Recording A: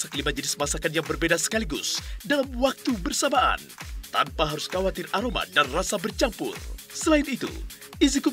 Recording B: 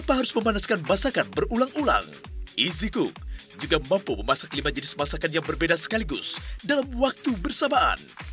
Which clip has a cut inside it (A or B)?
B